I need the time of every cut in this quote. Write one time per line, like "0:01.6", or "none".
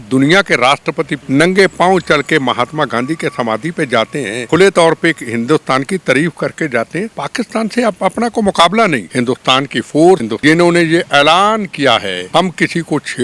0:01.2
0:04.4
0:07.2
0:09.1
0:10.3
0:12.2